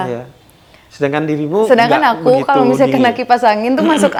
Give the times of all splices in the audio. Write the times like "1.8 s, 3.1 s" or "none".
none